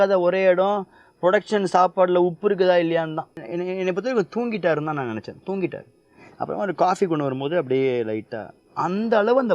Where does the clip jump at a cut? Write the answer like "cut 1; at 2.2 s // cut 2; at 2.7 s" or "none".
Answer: cut 1; at 3.4 s